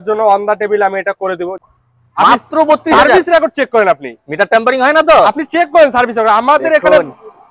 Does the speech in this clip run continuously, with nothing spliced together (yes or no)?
no